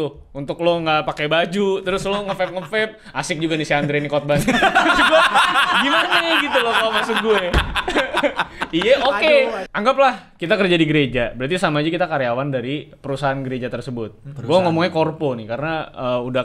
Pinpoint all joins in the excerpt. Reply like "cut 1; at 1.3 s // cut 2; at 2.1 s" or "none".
cut 1; at 9.6 s